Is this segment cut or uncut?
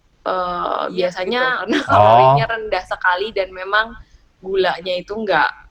cut